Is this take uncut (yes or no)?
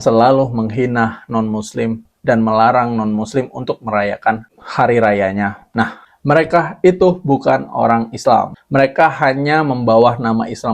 no